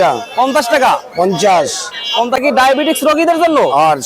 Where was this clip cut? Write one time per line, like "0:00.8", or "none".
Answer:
0:02.4

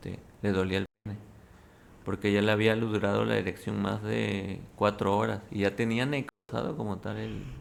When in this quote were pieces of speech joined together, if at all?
none

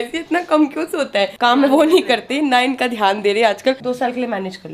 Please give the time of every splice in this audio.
0:01.4
0:03.8

